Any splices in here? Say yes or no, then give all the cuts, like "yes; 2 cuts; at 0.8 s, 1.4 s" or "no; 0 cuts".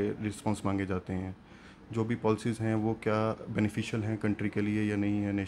no; 0 cuts